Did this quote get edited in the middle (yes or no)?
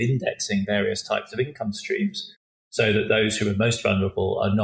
no